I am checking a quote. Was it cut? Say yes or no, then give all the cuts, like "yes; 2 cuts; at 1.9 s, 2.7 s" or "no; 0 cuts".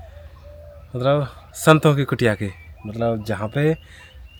no; 0 cuts